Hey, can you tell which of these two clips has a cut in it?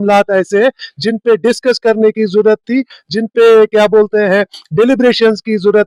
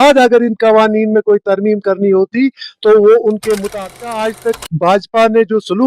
second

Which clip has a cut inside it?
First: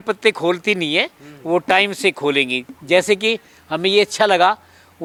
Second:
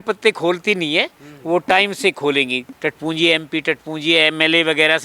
second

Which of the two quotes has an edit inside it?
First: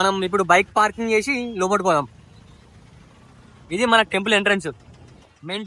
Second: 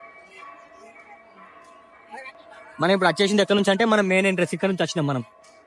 second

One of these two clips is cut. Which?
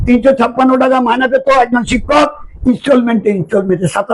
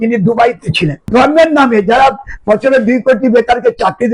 second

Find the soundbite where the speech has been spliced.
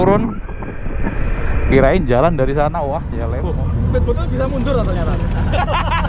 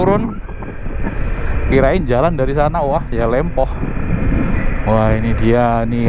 first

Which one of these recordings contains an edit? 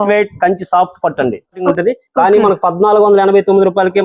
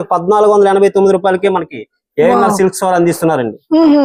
first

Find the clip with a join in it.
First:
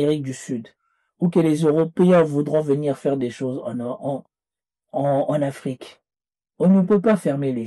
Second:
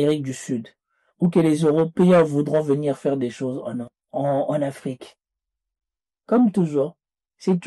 second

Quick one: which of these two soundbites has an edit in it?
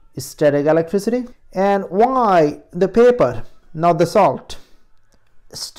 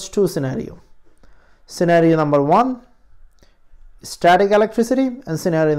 first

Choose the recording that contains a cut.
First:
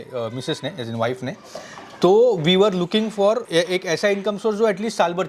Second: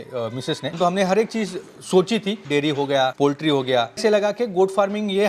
second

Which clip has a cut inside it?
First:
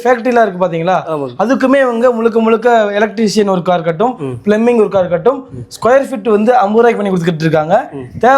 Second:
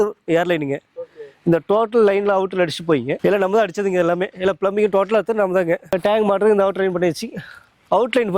second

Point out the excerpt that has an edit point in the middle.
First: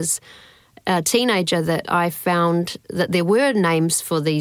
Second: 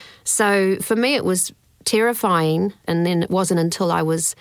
second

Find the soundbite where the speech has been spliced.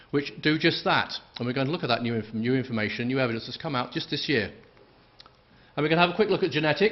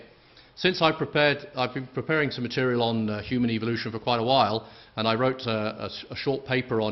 second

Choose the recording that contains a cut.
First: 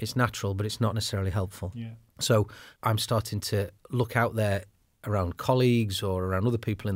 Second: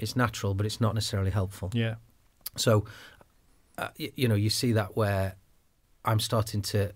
first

